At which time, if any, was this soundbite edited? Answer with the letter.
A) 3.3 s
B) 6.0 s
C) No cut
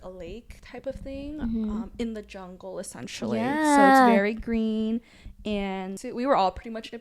B